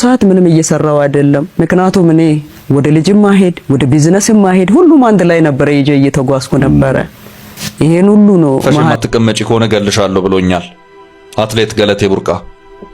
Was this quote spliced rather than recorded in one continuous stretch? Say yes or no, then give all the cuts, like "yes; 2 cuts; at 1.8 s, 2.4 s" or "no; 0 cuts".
yes; 1 cut; at 8.9 s